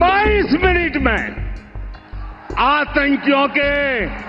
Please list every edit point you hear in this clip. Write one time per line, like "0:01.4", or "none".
none